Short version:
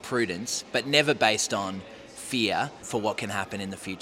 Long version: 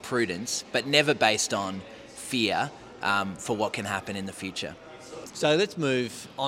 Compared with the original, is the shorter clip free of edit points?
no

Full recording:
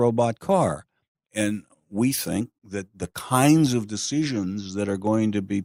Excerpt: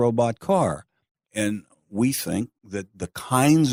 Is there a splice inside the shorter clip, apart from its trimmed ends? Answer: no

